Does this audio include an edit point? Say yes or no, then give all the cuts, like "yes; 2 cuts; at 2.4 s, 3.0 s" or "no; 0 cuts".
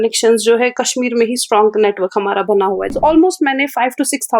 yes; 1 cut; at 2.9 s